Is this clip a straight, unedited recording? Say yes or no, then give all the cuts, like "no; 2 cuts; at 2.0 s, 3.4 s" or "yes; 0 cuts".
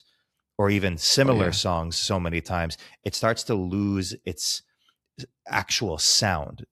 yes; 0 cuts